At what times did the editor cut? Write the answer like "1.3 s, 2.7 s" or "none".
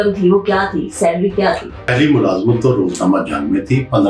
1.9 s